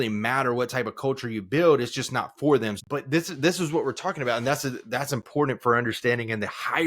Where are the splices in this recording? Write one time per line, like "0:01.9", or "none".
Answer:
0:02.8